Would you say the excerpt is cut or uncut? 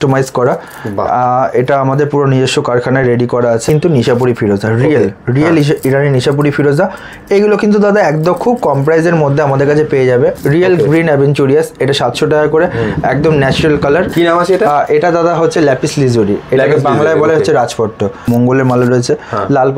cut